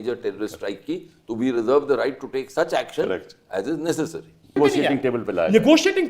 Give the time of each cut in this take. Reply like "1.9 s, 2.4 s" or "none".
4.4 s